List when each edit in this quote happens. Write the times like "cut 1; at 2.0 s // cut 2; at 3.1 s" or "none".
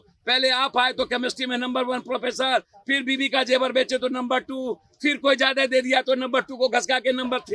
none